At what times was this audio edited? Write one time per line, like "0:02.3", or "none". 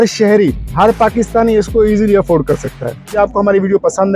0:03.0